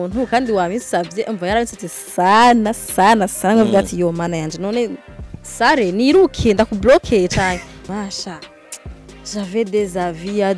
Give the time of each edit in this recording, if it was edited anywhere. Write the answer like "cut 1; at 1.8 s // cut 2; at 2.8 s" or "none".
cut 1; at 7.8 s